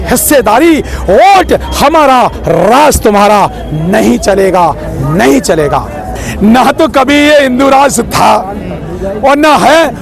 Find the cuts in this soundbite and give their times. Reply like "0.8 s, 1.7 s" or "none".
6.0 s